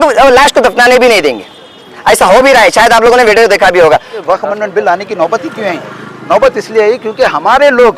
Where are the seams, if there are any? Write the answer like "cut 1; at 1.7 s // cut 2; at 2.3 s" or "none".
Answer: cut 1; at 4.1 s